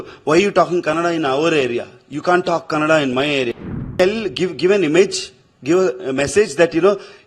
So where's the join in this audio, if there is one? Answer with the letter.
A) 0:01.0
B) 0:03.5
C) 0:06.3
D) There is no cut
B